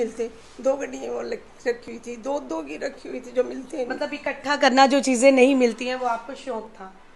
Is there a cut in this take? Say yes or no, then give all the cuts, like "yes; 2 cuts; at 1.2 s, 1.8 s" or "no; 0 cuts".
no; 0 cuts